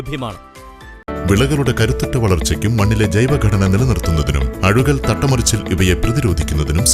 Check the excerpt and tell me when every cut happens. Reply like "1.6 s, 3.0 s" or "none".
1.0 s